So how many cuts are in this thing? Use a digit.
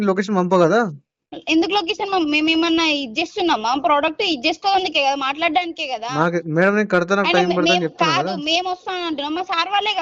0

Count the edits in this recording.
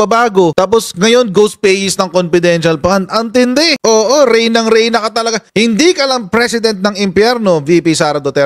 0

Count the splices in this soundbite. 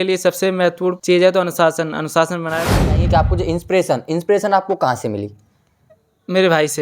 2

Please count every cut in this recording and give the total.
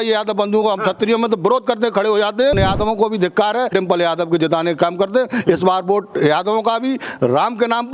2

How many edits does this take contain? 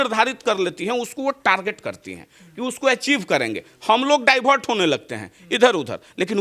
0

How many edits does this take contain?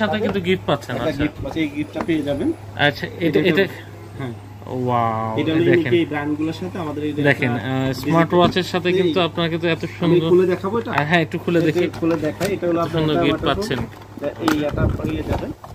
0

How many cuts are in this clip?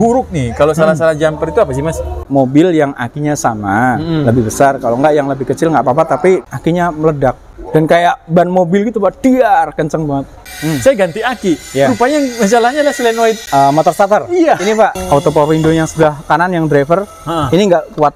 6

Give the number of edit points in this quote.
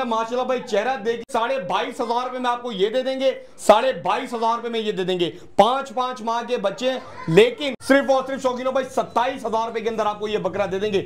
2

